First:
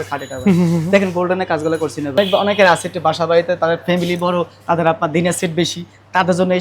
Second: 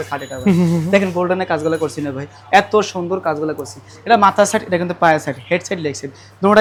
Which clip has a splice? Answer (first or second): first